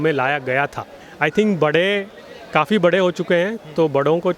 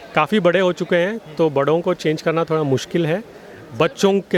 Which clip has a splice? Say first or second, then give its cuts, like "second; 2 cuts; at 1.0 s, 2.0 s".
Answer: first; 1 cut; at 1.0 s